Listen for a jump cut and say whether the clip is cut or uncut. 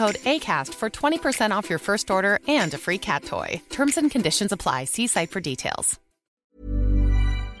cut